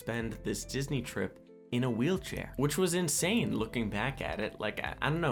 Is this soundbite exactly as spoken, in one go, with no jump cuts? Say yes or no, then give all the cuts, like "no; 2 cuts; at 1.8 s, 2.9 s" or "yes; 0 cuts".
yes; 0 cuts